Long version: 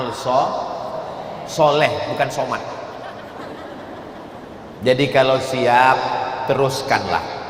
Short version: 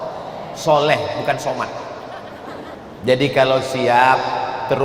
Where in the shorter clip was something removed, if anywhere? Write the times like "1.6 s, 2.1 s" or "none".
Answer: 2.8 s